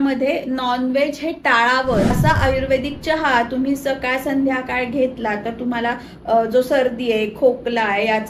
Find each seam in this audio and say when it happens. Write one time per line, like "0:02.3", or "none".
0:02.2